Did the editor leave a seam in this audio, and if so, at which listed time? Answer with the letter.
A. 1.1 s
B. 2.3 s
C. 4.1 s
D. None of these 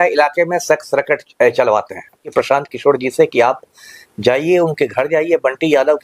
B